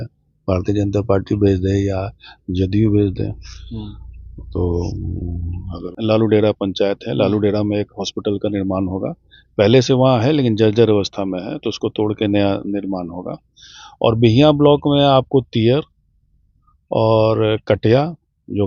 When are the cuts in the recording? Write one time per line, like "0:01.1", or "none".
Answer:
0:05.9